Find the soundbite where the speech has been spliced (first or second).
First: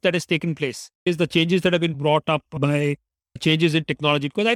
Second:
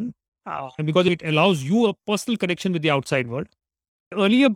first